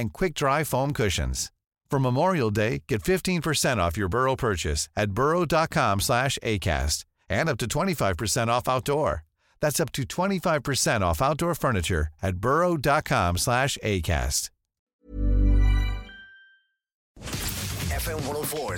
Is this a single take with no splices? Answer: no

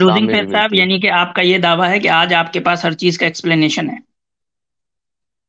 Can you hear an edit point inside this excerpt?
no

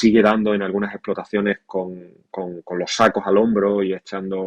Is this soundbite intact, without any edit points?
yes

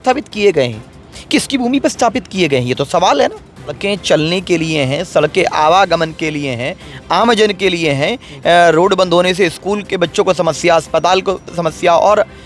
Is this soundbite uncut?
no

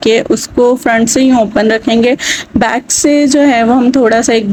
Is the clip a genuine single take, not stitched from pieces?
yes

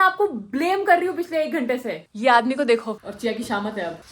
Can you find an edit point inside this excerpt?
yes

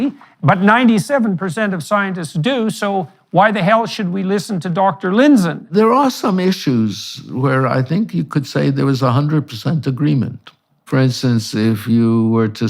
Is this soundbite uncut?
no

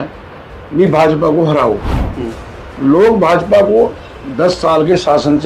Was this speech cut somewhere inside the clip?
no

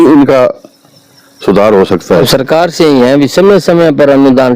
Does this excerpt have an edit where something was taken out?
yes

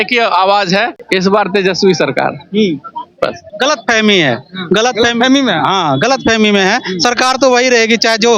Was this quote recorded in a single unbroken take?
no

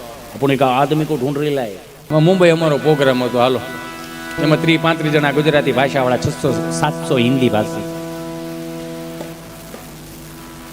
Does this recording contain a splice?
yes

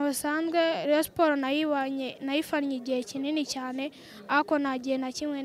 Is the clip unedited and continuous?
yes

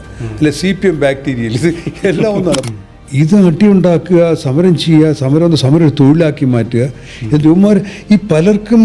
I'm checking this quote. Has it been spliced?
yes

